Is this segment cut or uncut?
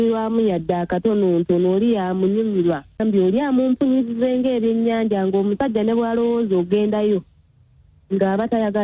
cut